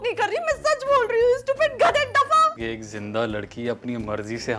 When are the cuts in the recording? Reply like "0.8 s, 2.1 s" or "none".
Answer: 2.7 s